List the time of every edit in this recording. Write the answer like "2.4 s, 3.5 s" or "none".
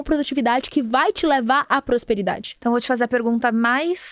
2.5 s